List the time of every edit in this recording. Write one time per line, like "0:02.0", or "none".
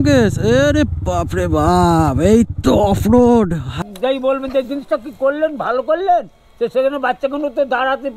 0:03.8